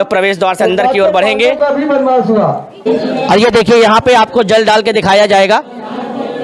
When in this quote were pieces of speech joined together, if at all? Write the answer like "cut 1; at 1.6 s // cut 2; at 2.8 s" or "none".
cut 1; at 2.8 s